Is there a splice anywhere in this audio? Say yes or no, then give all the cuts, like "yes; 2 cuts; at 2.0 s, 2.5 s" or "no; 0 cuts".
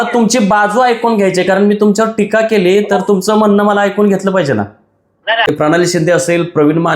yes; 1 cut; at 5.5 s